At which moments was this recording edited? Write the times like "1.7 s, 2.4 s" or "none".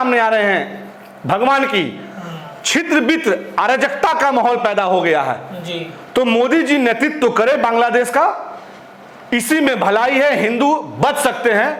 none